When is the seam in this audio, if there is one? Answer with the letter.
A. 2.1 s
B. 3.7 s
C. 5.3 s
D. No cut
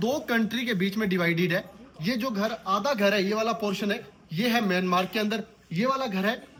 D